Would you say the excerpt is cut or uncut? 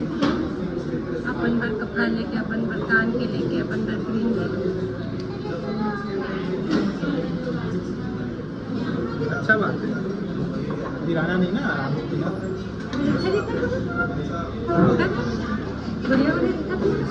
uncut